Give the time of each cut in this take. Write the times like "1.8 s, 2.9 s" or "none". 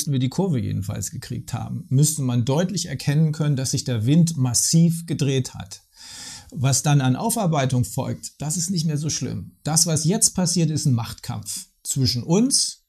none